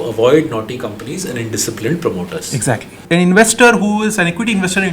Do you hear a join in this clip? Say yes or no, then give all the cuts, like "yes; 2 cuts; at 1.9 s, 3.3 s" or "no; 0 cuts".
yes; 1 cut; at 3.0 s